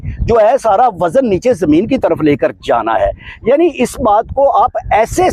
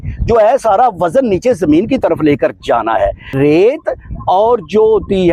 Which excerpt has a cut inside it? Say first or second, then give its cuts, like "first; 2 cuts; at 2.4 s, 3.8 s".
second; 1 cut; at 3.3 s